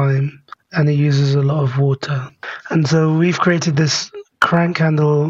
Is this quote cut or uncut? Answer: cut